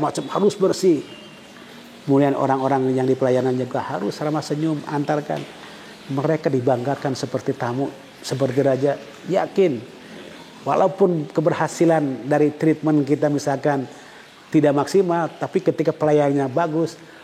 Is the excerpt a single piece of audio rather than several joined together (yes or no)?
yes